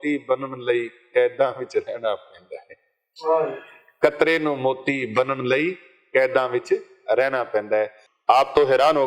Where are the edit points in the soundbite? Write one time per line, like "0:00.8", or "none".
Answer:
0:08.1

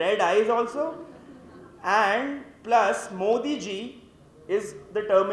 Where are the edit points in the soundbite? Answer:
none

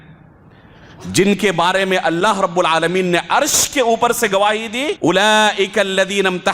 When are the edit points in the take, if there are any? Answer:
0:04.9

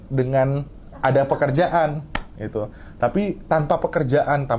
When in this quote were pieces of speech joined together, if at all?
none

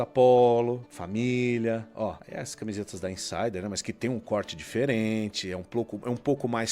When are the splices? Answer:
0:00.9
0:02.2

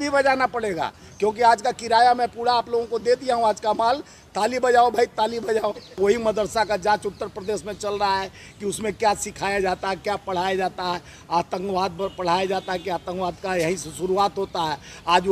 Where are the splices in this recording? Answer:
0:06.0

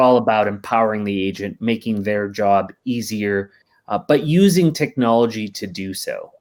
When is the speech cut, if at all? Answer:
none

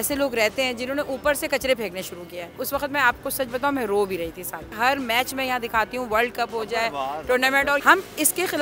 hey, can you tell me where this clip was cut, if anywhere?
0:02.5
0:04.7
0:07.8

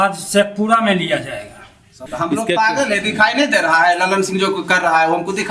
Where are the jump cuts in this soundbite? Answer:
0:02.0

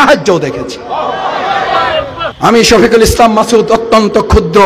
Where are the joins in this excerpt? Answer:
0:02.3

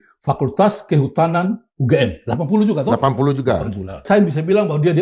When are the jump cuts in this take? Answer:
0:04.0

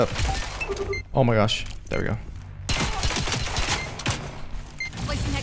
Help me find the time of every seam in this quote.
0:02.5

